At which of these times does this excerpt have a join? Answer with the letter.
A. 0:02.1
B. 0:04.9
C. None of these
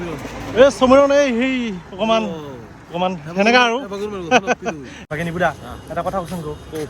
B